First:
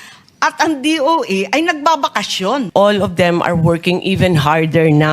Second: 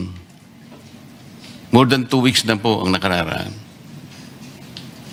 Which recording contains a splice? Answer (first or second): first